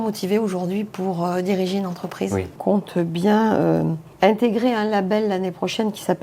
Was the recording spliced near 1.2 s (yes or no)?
no